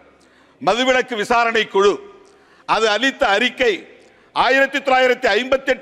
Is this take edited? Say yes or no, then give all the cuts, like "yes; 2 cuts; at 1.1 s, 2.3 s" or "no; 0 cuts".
no; 0 cuts